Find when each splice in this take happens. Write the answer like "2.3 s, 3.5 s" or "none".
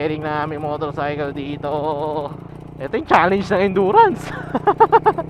none